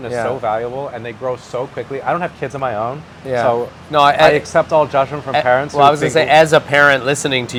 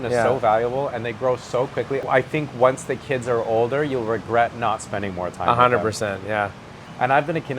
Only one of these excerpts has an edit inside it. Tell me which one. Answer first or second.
second